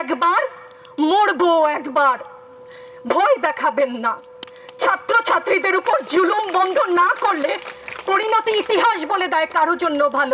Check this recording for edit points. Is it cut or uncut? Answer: uncut